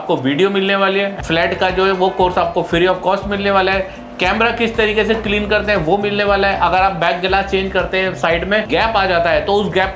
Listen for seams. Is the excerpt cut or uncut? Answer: cut